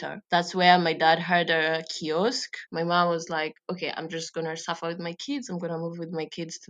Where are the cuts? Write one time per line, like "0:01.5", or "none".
0:02.6